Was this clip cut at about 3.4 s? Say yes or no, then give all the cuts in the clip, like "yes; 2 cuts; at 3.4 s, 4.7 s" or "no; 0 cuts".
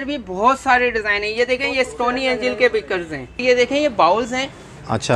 yes; 1 cut; at 3.4 s